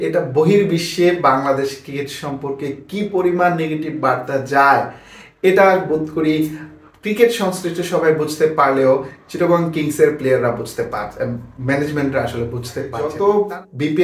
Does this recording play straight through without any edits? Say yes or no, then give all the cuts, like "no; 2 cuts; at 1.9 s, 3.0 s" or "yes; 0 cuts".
no; 1 cut; at 13.0 s